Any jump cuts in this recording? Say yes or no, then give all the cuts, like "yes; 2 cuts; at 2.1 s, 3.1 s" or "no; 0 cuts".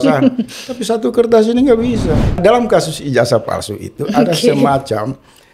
yes; 1 cut; at 2.4 s